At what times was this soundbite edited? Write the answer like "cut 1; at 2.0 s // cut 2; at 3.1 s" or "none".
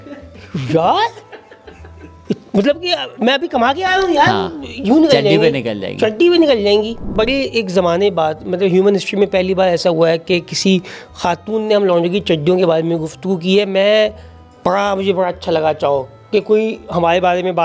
cut 1; at 7.1 s

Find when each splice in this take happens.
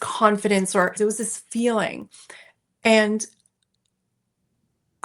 cut 1; at 0.9 s

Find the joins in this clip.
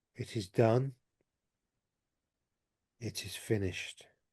cut 1; at 2.4 s

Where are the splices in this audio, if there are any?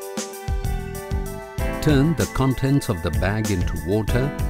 none

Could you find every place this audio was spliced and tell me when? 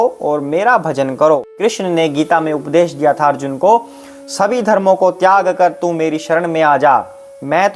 cut 1; at 1.5 s

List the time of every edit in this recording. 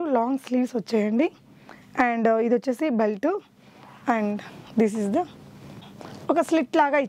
none

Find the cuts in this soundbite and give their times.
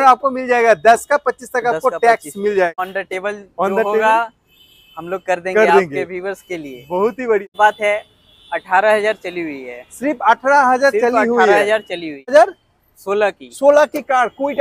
cut 1; at 2.8 s // cut 2; at 7.4 s // cut 3; at 12.3 s

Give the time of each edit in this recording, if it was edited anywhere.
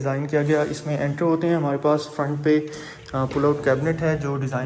none

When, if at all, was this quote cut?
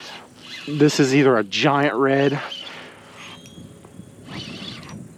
none

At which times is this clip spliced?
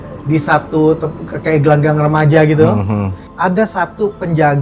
cut 1; at 3.2 s

